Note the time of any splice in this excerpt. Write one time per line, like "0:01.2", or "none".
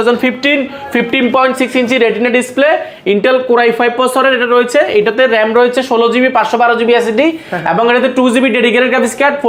none